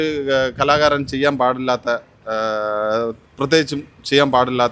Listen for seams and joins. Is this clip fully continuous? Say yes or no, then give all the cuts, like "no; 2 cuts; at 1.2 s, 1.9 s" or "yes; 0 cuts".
yes; 0 cuts